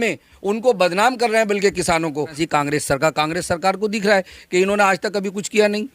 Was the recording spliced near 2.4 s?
yes; 1 cut; at 2.4 s

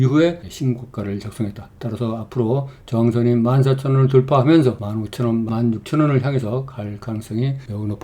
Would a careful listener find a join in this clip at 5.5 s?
yes; 1 cut; at 5.5 s

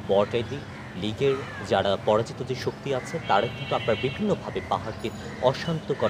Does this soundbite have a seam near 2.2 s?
no; 0 cuts

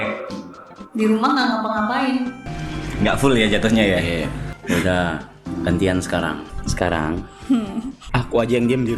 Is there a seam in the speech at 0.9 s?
no; 5 cuts; at 2.4 s, 4.5 s, 5.4 s, 6.5 s, 8.0 s

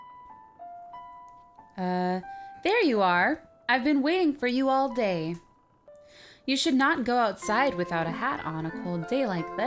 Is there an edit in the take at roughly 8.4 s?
yes; 1 cut; at 8.4 s

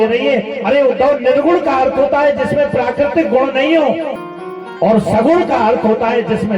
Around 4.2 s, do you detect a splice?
yes; 1 cut; at 4.2 s

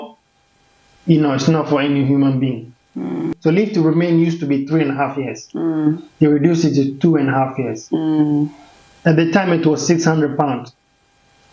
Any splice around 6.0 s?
no; 1 cut; at 3.3 s

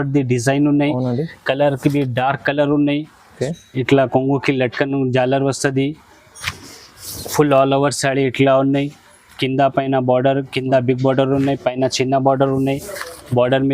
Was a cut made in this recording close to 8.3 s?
no; 1 cut; at 3.3 s

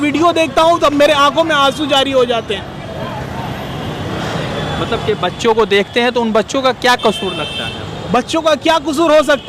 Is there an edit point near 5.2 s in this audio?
no; 0 cuts

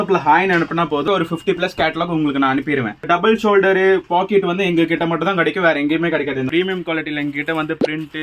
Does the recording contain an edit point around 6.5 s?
yes; 3 cuts; at 1.0 s, 3.0 s, 6.5 s

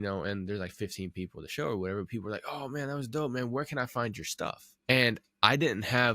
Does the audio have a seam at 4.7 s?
yes; 1 cut; at 4.7 s

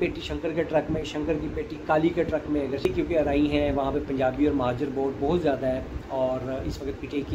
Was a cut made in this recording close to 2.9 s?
yes; 1 cut; at 2.9 s

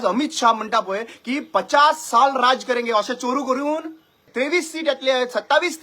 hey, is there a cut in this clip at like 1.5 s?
no; 1 cut; at 4.2 s

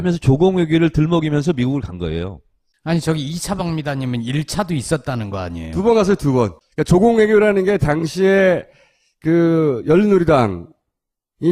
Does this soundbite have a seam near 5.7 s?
yes; 1 cut; at 5.7 s

